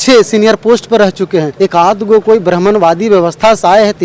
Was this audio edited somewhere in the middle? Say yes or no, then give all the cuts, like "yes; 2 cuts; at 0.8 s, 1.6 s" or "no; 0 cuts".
yes; 1 cut; at 1.5 s